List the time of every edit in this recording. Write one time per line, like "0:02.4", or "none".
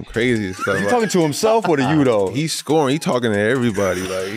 0:02.3

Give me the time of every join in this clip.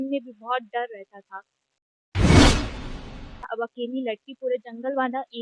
0:01.8
0:03.4

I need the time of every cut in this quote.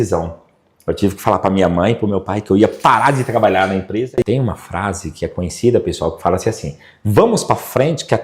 0:04.0

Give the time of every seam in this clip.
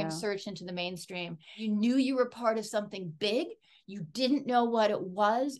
0:01.5

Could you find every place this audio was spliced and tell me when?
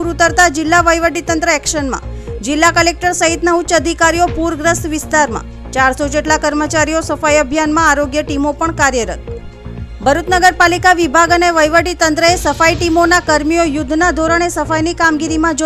none

